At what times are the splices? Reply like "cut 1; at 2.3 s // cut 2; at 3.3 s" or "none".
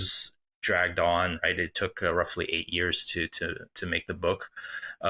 none